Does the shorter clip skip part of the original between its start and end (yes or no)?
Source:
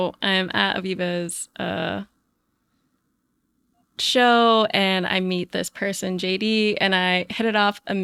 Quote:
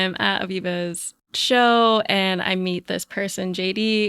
yes